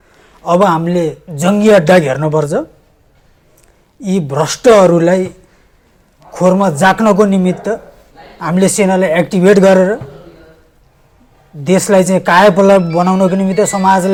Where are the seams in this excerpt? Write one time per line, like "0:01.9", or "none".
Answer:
none